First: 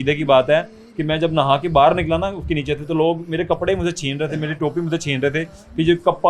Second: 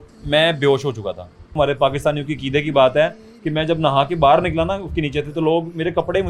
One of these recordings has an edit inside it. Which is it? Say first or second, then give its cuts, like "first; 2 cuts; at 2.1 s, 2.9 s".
second; 1 cut; at 1.5 s